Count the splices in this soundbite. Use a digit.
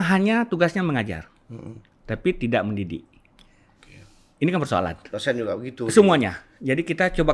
0